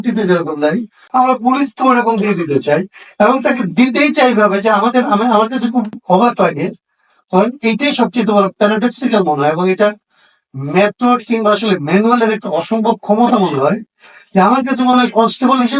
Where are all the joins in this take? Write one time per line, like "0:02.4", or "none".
0:01.0